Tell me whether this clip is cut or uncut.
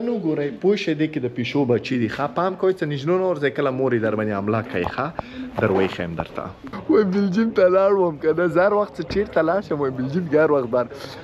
cut